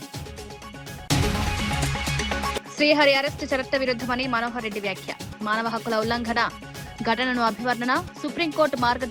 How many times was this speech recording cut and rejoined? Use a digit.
2